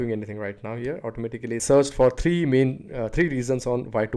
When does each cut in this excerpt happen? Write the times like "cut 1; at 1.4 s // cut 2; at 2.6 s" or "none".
cut 1; at 1.6 s